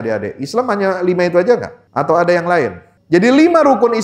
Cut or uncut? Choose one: cut